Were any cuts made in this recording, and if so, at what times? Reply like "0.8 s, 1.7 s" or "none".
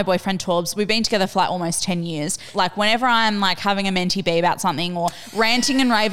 2.5 s